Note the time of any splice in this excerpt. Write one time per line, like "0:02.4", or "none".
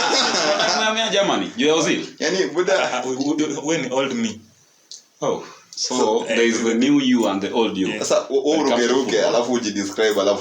none